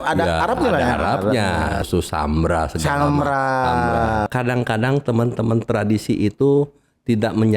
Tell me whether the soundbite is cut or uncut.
cut